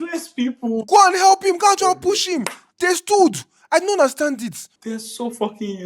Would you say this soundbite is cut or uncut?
cut